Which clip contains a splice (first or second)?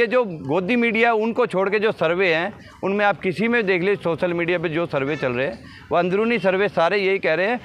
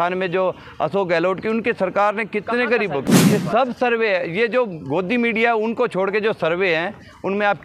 second